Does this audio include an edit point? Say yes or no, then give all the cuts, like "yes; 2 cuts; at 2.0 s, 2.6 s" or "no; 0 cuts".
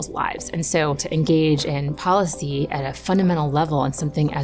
yes; 1 cut; at 1.0 s